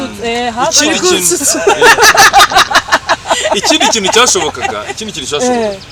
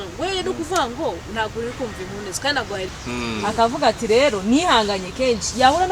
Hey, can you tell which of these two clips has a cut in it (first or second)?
second